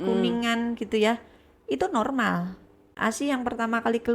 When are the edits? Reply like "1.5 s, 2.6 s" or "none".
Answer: 2.9 s